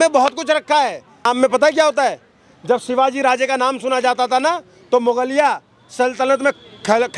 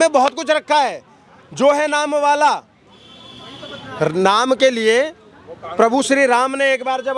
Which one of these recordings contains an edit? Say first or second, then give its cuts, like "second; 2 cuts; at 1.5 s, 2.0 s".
first; 1 cut; at 1.2 s